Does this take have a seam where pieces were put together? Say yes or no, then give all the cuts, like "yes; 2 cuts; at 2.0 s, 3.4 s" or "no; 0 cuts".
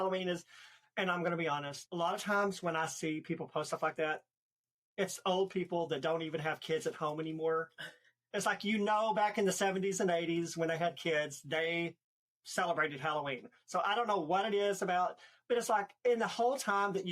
yes; 2 cuts; at 1.8 s, 15.9 s